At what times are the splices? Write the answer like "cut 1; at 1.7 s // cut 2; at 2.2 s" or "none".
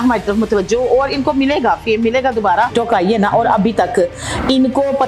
cut 1; at 2.7 s

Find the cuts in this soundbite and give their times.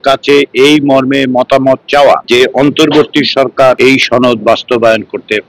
cut 1; at 2.2 s // cut 2; at 3.8 s

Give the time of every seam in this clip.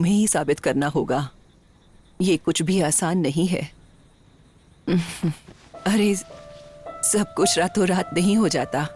none

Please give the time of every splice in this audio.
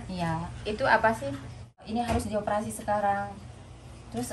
cut 1; at 1.9 s

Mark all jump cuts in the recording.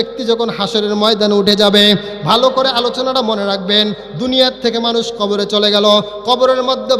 none

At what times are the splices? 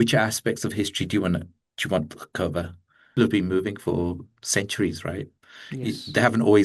cut 1; at 3.1 s

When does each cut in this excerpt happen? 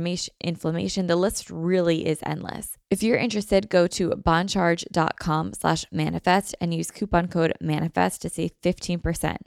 cut 1; at 2.7 s

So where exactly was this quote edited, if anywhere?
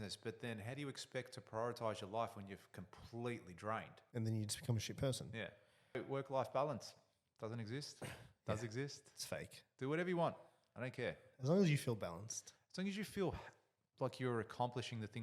cut 1; at 4.0 s // cut 2; at 6.0 s

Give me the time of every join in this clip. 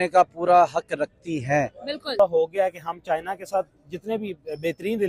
cut 1; at 2.1 s

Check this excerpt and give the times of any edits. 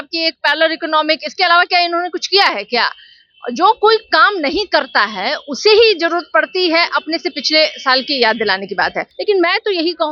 cut 1; at 9.1 s

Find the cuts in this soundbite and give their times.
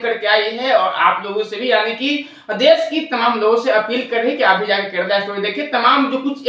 none

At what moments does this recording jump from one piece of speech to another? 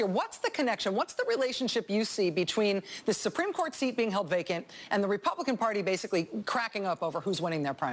cut 1; at 1.4 s

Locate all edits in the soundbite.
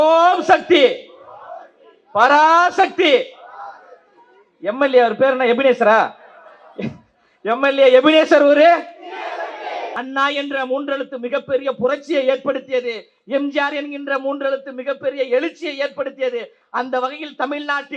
cut 1; at 10.0 s

